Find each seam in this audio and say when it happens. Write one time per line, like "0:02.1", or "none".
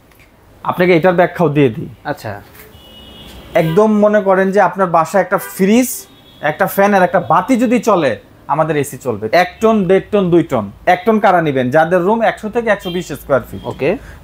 0:09.3